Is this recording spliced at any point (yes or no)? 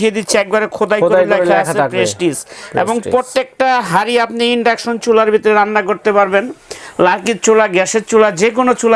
no